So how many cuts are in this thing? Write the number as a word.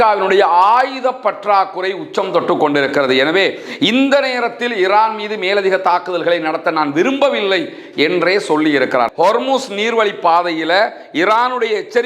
one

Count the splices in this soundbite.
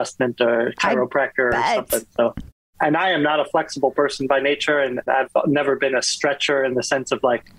one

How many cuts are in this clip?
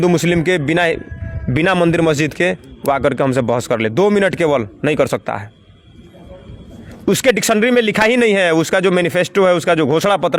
zero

